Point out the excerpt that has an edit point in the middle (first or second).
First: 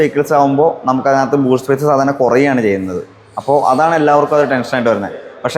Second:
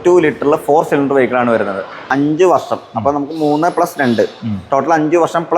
second